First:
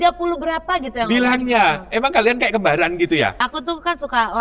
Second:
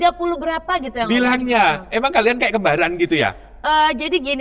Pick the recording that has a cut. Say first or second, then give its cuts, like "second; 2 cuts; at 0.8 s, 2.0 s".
first; 1 cut; at 3.5 s